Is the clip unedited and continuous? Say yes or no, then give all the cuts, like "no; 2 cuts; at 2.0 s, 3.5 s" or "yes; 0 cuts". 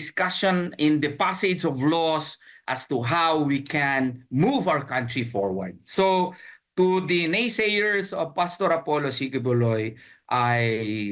yes; 0 cuts